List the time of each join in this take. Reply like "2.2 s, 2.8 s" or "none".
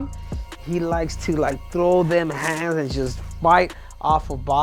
none

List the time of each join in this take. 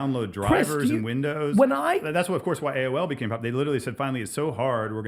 none

